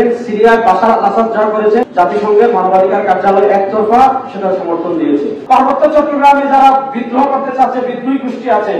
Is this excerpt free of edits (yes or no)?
no